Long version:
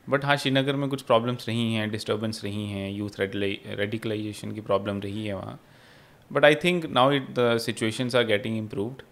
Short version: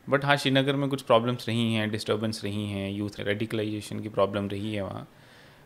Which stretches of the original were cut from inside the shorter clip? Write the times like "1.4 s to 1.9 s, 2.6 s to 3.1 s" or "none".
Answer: 3.1 s to 3.6 s